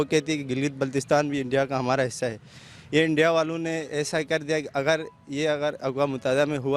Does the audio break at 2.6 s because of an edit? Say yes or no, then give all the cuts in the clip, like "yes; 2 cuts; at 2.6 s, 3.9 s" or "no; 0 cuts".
no; 0 cuts